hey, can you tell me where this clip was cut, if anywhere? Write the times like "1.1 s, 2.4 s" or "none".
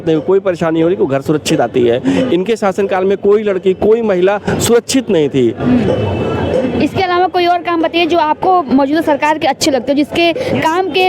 none